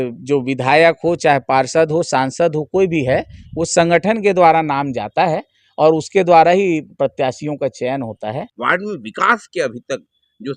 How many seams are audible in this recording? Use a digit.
1